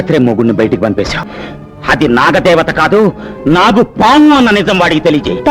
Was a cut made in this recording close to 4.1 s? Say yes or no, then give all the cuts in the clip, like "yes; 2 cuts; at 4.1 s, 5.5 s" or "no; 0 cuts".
no; 1 cut; at 1.3 s